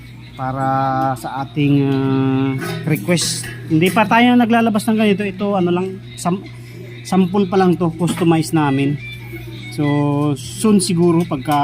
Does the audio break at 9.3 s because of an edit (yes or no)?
no